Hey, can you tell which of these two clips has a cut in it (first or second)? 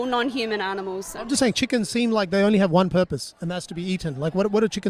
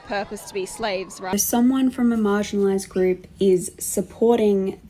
second